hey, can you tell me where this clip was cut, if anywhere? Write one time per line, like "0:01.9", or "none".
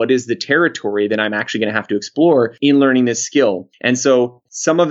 0:02.5